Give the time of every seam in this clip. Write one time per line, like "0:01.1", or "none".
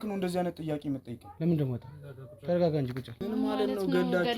0:03.1